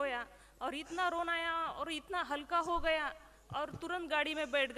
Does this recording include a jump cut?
no; 0 cuts

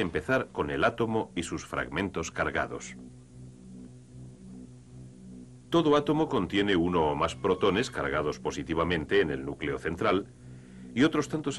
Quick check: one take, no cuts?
yes; 0 cuts

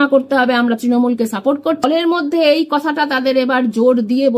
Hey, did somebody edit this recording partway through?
yes; 1 cut; at 1.8 s

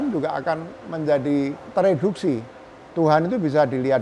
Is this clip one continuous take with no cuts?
no; 1 cut; at 1.6 s

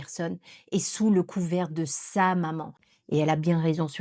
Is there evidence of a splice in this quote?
yes; 1 cut; at 2.9 s

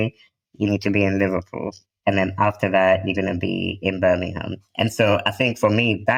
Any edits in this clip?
no; 0 cuts

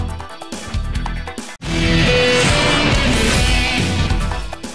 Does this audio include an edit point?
yes; 1 cut; at 1.3 s

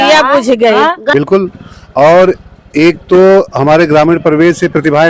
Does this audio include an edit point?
yes; 1 cut; at 1.0 s

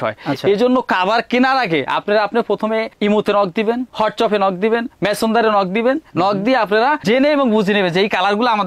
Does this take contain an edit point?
no; 0 cuts

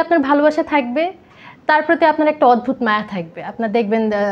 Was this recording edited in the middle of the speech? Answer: no; 0 cuts

